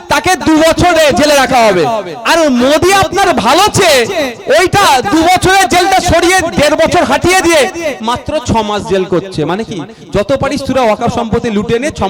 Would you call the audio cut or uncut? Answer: uncut